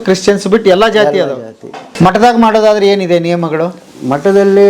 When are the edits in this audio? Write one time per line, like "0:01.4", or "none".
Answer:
0:01.9